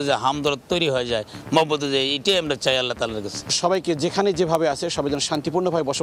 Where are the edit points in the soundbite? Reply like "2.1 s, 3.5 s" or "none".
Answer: 3.4 s

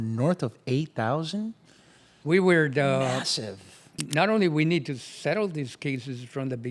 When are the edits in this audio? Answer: 3.9 s

